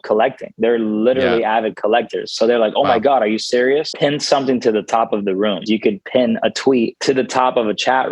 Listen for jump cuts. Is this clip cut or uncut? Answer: cut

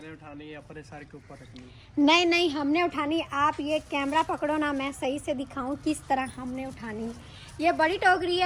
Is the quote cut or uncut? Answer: uncut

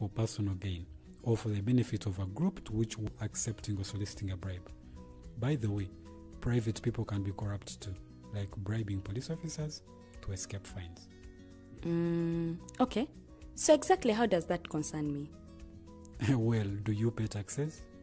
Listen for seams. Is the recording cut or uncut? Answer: cut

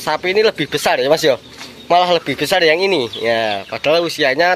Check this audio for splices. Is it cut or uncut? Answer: uncut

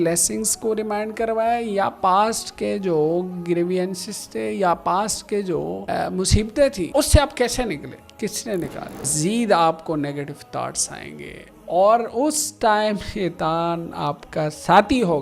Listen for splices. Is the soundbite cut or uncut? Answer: cut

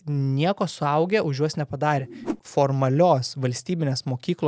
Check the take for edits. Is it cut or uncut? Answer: cut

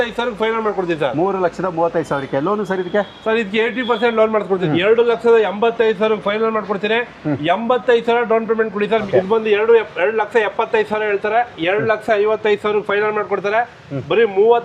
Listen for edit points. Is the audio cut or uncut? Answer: cut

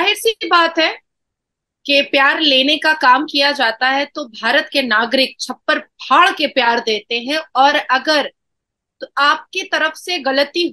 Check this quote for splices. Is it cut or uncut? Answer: uncut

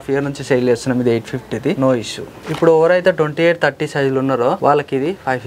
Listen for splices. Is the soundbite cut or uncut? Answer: cut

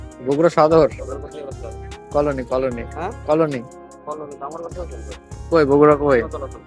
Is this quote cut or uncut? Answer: uncut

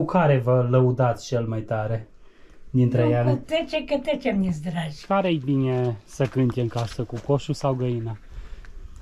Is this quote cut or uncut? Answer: cut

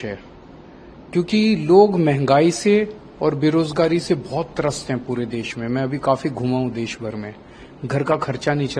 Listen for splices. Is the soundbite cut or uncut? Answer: uncut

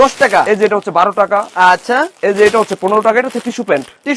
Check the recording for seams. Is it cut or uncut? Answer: uncut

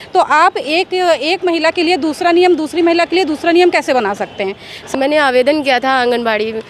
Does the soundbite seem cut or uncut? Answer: cut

